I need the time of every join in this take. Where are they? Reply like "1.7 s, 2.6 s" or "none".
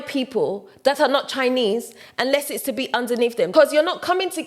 3.5 s